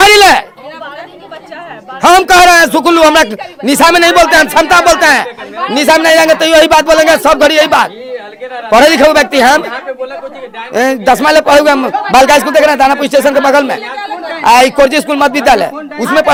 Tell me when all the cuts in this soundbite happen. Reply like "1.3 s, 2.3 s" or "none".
none